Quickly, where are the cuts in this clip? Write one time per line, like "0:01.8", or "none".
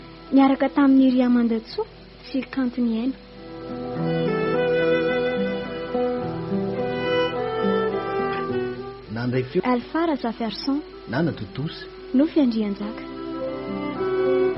0:09.6
0:11.0

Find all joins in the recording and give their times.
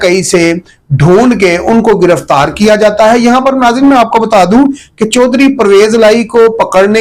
none

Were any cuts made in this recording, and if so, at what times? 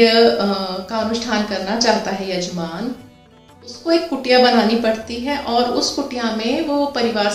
none

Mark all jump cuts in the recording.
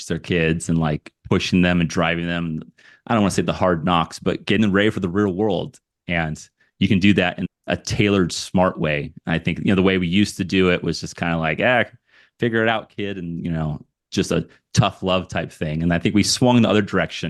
none

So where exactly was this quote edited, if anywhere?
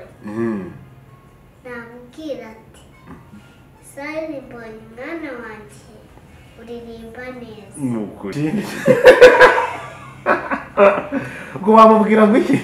0:08.3

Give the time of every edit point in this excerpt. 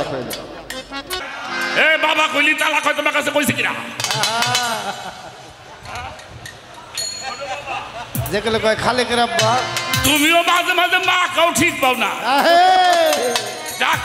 0:01.2

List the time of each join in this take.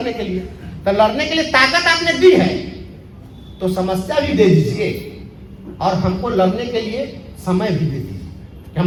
none

